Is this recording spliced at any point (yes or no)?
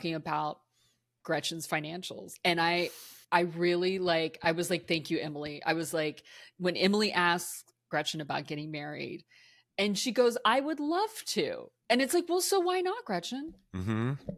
no